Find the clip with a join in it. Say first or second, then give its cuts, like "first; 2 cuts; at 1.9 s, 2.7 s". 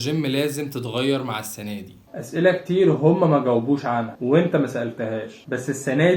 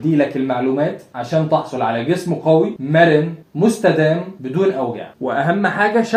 first; 1 cut; at 2.0 s